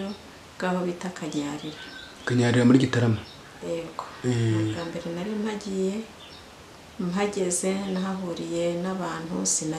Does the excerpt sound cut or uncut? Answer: uncut